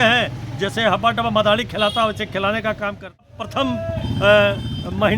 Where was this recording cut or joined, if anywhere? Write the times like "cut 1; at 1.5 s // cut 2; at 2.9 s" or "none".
cut 1; at 3.2 s